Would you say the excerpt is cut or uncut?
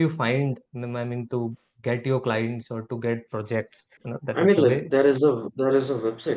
cut